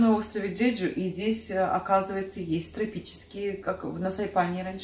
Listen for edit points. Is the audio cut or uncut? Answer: uncut